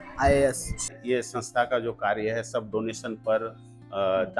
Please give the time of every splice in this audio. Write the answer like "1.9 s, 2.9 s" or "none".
1.0 s